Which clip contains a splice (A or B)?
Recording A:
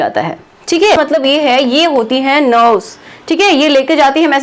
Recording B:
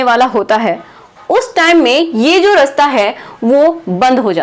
A